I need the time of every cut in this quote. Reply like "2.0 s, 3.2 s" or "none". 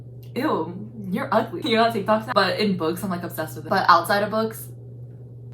none